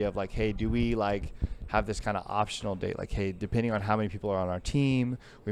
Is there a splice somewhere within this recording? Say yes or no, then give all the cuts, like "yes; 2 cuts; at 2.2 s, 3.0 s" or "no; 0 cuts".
no; 0 cuts